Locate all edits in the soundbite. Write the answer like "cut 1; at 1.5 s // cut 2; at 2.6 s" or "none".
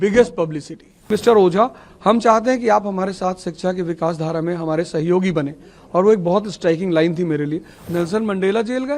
cut 1; at 1.1 s // cut 2; at 7.7 s